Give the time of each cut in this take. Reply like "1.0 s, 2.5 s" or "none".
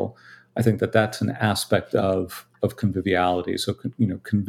none